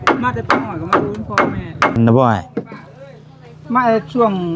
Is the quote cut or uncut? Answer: cut